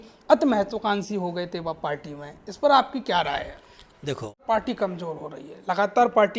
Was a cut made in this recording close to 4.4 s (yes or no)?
yes